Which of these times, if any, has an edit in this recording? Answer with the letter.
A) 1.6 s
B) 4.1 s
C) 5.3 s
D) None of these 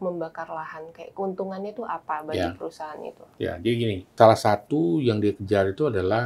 B